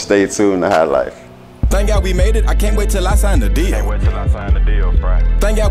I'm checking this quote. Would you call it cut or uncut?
cut